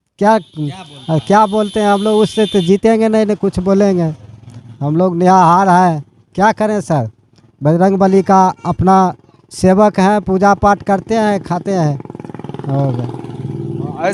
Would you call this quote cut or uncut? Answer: uncut